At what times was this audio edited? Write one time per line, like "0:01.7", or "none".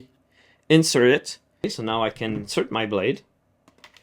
0:01.8